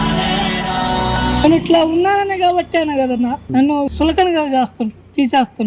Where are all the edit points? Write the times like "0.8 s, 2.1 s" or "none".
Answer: 1.4 s